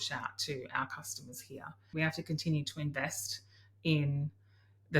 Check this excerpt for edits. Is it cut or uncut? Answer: cut